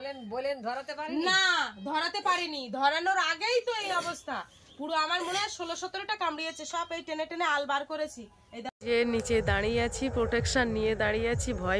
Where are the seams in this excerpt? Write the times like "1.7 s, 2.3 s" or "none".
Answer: 8.7 s